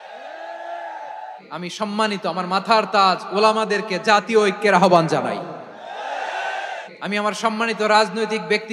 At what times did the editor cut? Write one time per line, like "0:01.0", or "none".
0:01.4
0:06.9